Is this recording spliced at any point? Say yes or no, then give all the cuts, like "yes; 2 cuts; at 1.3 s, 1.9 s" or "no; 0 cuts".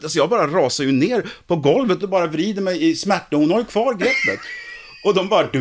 yes; 1 cut; at 2.0 s